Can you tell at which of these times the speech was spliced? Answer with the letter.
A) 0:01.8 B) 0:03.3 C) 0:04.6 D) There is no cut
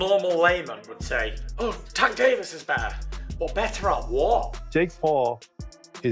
C